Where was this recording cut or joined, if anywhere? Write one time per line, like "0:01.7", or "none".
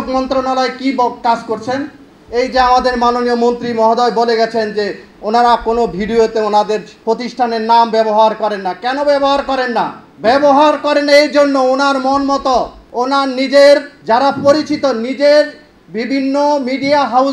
0:06.9
0:10.0
0:12.8
0:13.9

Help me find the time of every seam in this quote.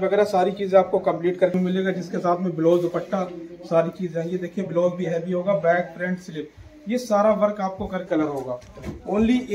0:01.5
0:08.1

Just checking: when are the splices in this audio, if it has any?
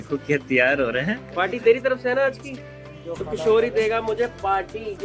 0:01.3

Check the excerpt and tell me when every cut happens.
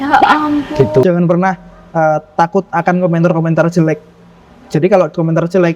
0:01.0

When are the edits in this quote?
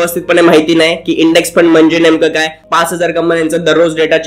0:02.6

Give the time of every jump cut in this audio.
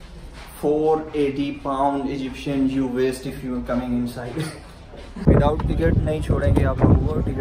0:05.1

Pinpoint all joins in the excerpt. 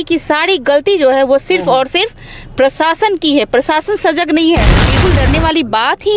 0:04.8

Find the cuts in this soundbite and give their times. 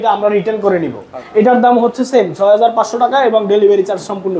0:01.2

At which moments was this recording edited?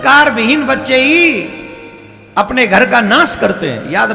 none

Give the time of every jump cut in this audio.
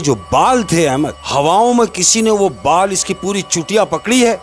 0:01.2

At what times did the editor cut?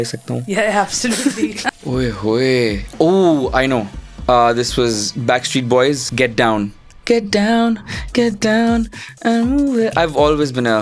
0:01.6
0:06.1

